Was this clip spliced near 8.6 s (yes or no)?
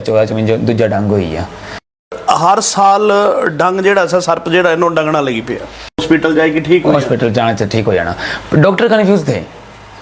no